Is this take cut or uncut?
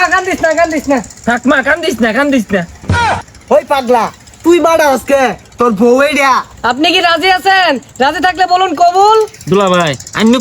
cut